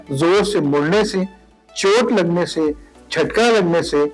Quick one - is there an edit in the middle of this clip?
no; 0 cuts

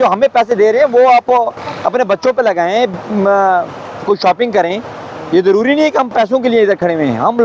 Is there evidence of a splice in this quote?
no; 0 cuts

